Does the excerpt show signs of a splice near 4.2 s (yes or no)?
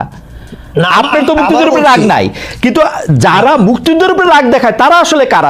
no